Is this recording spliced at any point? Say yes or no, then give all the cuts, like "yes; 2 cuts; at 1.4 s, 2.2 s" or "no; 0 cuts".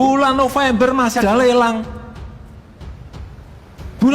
yes; 1 cut; at 1.2 s